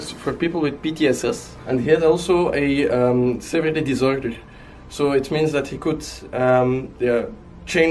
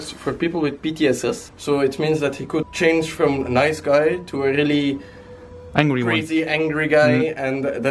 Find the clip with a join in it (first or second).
second